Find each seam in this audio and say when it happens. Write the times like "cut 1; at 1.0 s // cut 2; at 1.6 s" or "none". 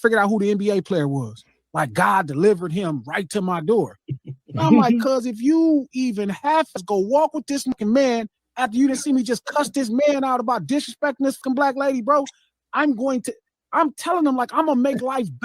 cut 1; at 6.8 s // cut 2; at 7.7 s // cut 3; at 11.4 s